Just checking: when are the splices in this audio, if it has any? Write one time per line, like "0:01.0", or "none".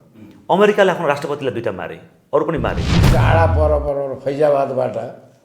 0:03.0